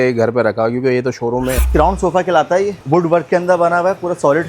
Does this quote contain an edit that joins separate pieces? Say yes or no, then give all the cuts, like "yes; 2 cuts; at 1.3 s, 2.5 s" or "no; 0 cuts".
yes; 2 cuts; at 1.6 s, 2.8 s